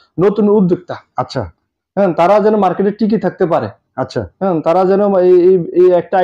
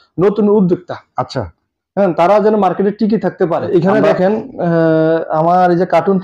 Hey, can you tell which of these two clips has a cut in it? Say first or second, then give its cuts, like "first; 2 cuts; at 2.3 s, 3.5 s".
second; 1 cut; at 3.7 s